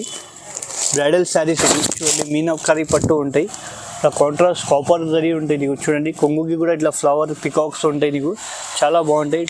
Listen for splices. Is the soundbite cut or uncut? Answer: uncut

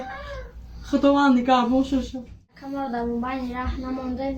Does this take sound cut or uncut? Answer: cut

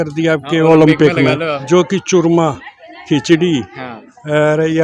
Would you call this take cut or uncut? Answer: cut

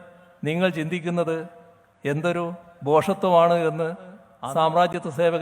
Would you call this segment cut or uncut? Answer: cut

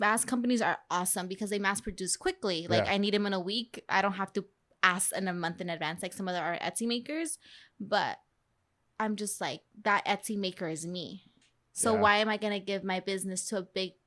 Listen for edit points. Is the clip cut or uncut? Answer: uncut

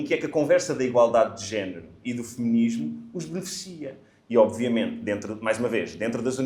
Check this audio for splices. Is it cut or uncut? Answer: uncut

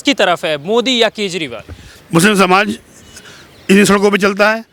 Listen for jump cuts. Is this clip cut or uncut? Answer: uncut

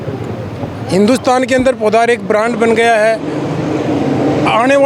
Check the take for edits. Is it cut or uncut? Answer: uncut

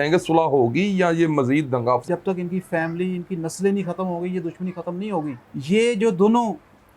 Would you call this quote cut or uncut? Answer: cut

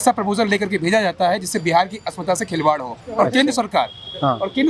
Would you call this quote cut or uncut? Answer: uncut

